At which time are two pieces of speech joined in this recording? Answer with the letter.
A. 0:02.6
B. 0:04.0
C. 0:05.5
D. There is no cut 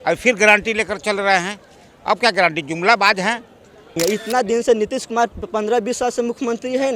B